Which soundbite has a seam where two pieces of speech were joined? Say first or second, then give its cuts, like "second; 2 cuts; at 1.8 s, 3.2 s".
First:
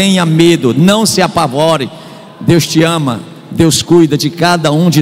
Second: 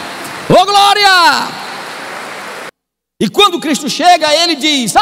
second; 1 cut; at 2.7 s